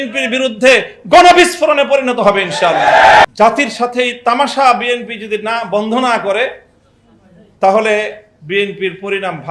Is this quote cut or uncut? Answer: cut